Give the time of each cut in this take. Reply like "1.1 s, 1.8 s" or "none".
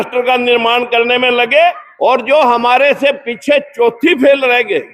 1.9 s